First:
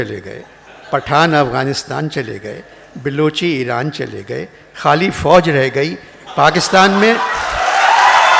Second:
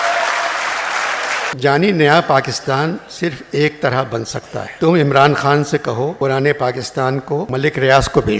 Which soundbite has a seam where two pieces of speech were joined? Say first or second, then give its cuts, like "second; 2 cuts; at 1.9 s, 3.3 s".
second; 4 cuts; at 1.5 s, 4.7 s, 6.1 s, 7.5 s